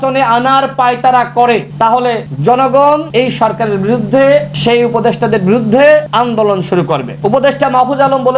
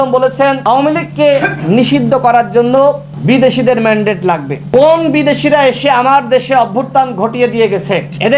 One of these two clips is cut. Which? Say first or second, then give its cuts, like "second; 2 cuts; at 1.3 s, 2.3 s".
first; 5 cuts; at 1.8 s, 3.1 s, 4.5 s, 6.1 s, 7.1 s